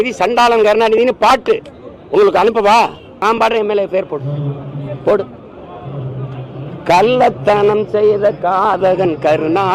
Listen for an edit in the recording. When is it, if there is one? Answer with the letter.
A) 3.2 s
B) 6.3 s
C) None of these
A